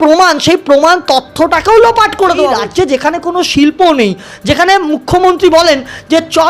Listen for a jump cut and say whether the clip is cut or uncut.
cut